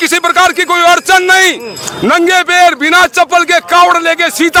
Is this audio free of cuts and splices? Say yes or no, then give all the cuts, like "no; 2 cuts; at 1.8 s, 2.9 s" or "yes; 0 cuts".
yes; 0 cuts